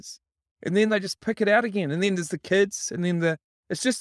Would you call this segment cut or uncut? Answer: uncut